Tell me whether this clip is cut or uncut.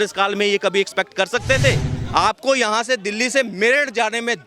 cut